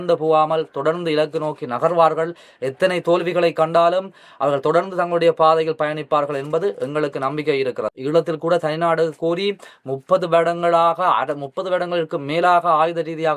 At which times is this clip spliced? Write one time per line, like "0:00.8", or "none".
0:07.9